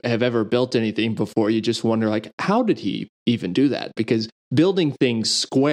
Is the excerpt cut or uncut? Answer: uncut